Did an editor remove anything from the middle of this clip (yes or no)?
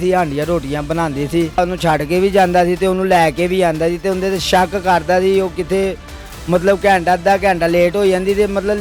no